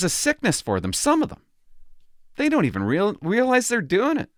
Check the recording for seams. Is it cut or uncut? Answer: uncut